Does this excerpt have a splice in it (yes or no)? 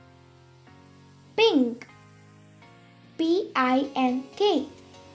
yes